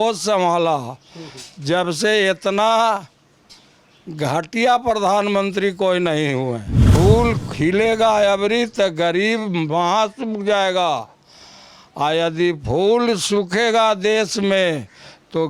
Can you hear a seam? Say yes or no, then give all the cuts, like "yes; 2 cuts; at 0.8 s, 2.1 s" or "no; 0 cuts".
yes; 1 cut; at 6.8 s